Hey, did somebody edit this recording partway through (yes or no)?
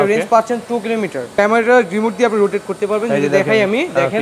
no